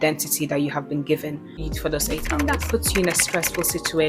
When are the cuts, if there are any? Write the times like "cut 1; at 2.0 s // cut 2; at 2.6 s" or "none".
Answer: cut 1; at 1.6 s

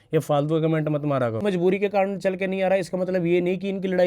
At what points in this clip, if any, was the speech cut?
cut 1; at 1.4 s

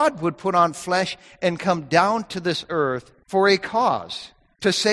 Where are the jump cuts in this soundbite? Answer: cut 1; at 3.1 s

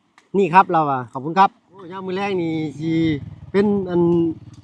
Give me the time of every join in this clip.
cut 1; at 2.0 s

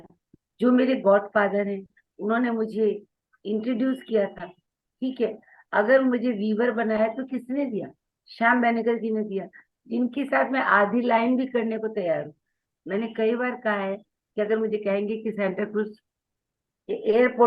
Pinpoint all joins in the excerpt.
none

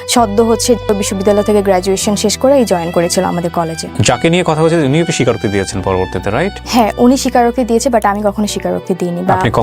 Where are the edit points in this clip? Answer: cut 1; at 0.8 s // cut 2; at 3.9 s // cut 3; at 6.6 s

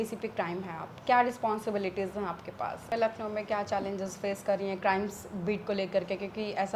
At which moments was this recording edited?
cut 1; at 2.9 s

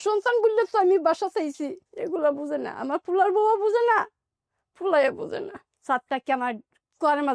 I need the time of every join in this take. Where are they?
cut 1; at 1.9 s // cut 2; at 5.6 s

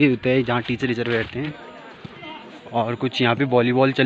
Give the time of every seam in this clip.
cut 1; at 1.5 s

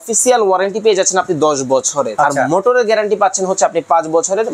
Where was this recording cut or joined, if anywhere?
cut 1; at 2.1 s

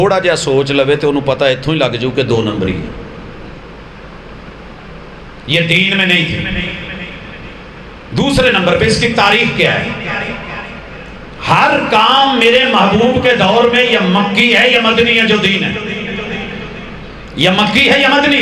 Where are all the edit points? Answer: none

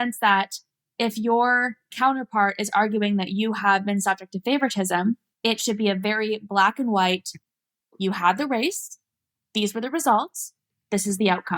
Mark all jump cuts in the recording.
cut 1; at 1.9 s // cut 2; at 5.3 s

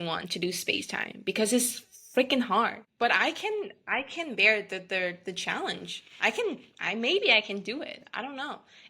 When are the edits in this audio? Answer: cut 1; at 2.8 s

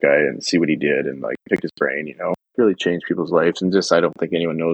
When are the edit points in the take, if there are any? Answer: cut 1; at 2.4 s

